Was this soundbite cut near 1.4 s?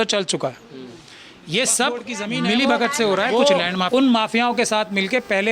no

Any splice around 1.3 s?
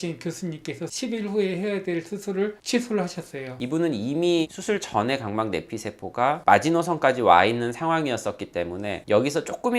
no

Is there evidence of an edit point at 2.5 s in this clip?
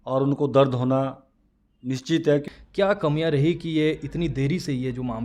yes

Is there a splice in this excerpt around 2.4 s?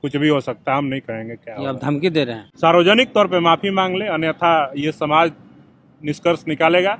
yes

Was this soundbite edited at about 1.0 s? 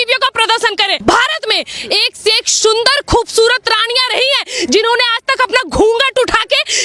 yes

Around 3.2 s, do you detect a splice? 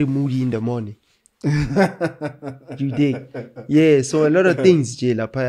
no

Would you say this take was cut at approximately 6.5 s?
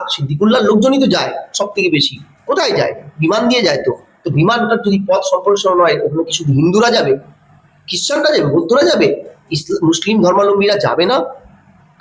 no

